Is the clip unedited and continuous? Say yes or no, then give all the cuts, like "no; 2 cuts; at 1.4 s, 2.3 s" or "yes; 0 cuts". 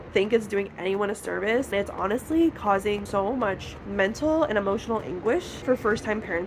no; 3 cuts; at 1.7 s, 3.0 s, 5.5 s